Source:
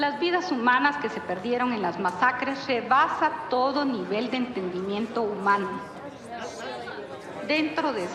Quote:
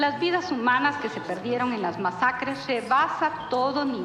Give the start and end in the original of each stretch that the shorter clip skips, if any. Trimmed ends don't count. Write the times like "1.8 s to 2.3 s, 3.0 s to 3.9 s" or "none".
none

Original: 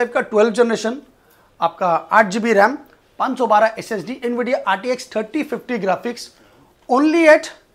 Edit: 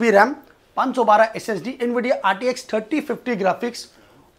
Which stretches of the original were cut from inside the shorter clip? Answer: none

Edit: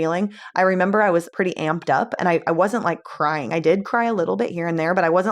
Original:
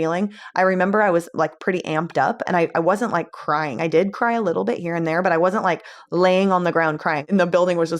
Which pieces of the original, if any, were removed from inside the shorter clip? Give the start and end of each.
1.3 s to 1.6 s

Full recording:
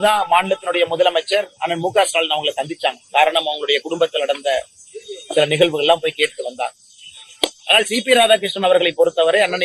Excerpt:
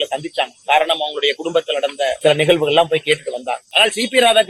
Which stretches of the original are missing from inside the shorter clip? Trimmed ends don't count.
4.6 s to 5.3 s, 6.8 s to 7.6 s

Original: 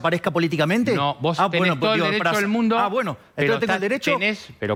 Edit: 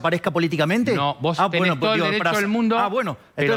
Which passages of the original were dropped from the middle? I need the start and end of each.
none

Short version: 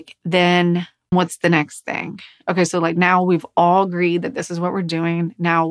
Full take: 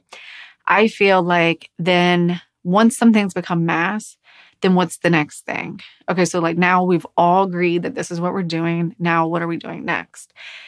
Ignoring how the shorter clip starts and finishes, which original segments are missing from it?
2.7 s to 4.7 s

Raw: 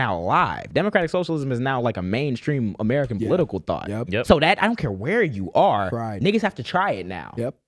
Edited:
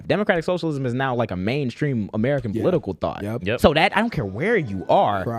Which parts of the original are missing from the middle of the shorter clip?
none

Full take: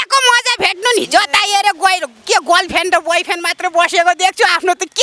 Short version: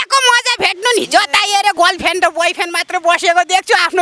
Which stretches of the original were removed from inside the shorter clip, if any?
1.7 s to 2.4 s

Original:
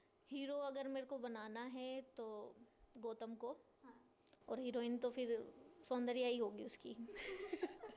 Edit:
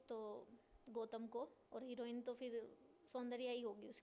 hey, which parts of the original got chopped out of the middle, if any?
3.7 s to 4.4 s

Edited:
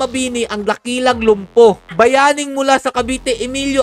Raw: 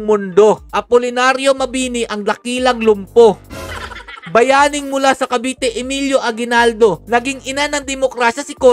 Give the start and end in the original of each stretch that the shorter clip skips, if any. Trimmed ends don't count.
3.4 s to 4.2 s

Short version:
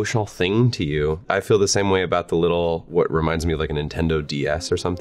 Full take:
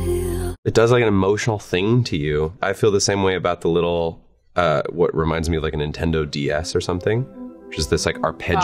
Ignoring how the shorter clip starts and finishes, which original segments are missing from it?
4.2 s to 4.9 s

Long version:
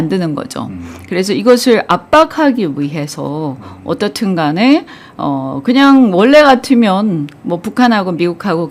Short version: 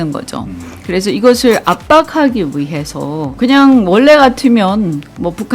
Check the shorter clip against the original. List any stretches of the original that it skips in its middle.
3.5 s to 5.6 s

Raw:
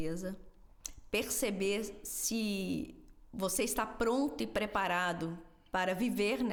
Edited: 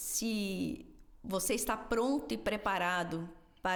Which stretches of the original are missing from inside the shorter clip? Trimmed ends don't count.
none

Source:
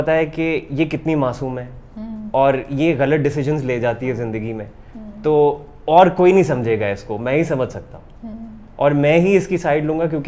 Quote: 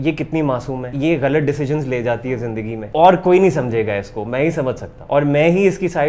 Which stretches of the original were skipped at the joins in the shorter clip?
1.6 s to 2.7 s, 4.6 s to 5.7 s, 7.8 s to 8.6 s

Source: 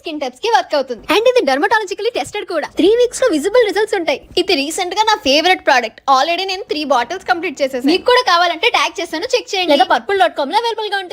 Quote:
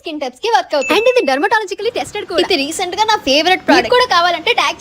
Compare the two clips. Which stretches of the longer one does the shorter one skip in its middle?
0.9 s to 1.1 s, 2.5 s to 4.3 s, 5.8 s to 7.9 s

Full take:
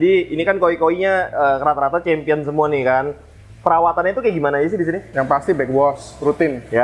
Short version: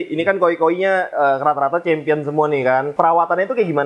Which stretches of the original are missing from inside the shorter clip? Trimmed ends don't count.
3.1 s to 3.6 s

